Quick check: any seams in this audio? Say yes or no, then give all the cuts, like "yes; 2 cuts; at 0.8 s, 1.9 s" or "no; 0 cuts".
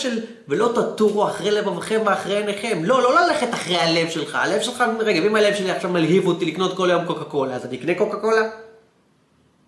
no; 0 cuts